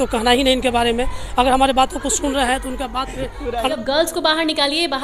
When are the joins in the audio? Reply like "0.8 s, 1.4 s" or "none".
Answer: 3.7 s